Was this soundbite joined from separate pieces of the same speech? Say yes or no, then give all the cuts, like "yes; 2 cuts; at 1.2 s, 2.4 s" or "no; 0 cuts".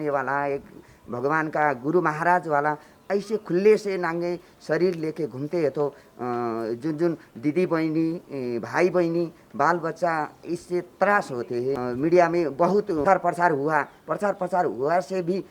yes; 2 cuts; at 11.8 s, 13.0 s